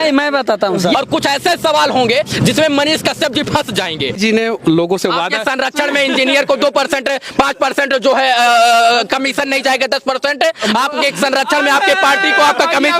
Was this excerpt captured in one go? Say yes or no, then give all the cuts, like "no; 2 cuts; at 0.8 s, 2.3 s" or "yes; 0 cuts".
no; 2 cuts; at 0.9 s, 4.2 s